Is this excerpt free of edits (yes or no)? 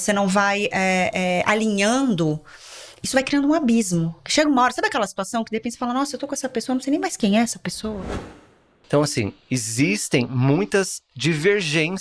no